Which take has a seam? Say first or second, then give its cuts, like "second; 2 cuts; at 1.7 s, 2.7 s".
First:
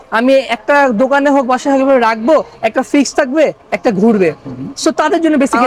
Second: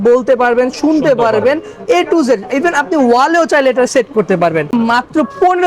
second; 1 cut; at 4.7 s